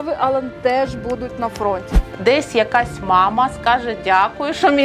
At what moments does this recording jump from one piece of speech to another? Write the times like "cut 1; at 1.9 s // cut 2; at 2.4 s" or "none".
cut 1; at 1.9 s